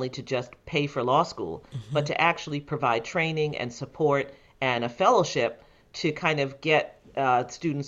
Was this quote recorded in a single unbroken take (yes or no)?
yes